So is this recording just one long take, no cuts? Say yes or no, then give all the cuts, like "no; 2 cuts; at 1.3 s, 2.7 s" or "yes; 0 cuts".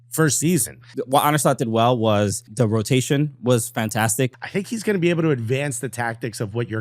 no; 3 cuts; at 1.0 s, 2.4 s, 4.3 s